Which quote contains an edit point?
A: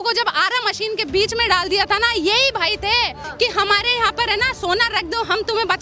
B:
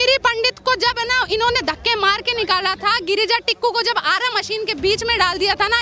A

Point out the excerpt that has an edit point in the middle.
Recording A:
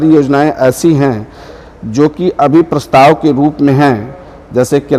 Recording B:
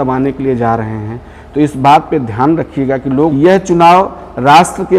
B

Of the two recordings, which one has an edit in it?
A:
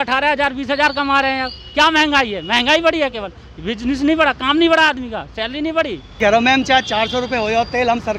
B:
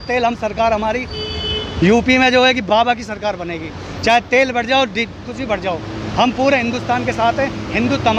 A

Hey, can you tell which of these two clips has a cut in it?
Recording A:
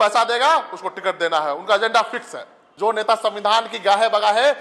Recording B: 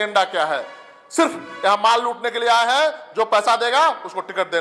A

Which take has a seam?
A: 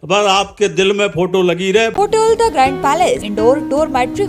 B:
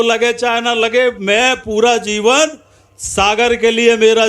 A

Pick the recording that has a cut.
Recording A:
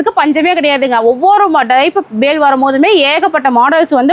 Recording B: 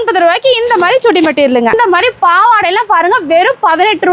B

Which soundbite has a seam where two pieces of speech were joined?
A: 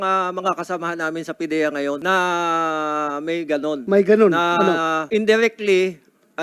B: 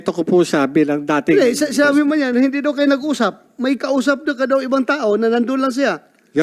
A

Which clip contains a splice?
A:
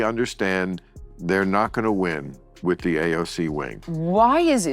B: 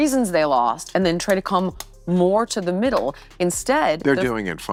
A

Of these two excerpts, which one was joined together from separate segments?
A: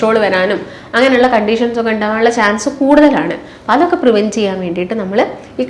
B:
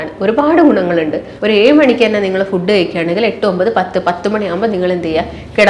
B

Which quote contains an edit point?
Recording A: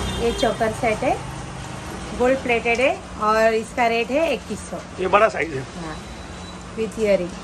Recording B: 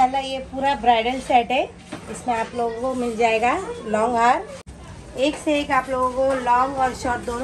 B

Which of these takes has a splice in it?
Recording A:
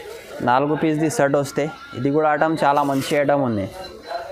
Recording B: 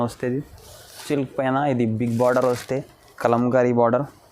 B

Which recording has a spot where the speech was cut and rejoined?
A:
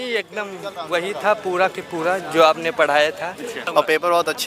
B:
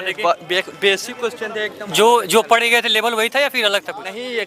A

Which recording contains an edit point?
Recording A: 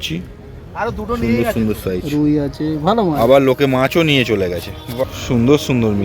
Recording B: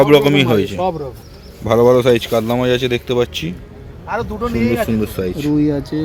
A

